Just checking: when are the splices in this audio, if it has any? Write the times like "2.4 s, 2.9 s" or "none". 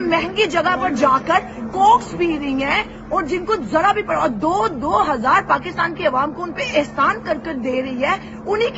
none